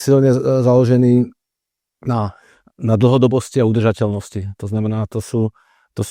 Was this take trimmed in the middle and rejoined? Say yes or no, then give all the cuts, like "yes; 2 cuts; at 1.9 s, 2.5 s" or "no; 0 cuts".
no; 0 cuts